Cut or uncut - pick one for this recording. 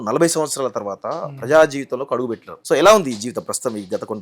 cut